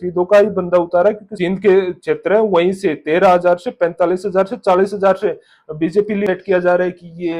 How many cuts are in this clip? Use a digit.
2